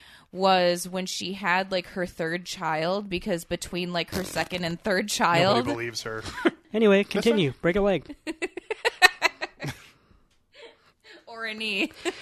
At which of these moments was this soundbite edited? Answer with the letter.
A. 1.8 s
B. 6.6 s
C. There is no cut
B